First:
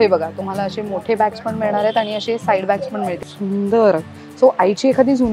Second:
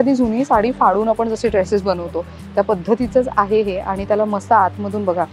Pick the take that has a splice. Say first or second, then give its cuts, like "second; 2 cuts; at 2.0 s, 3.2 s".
first; 1 cut; at 3.2 s